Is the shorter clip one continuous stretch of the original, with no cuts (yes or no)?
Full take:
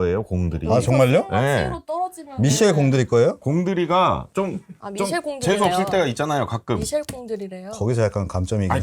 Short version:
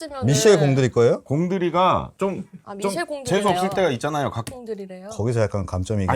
no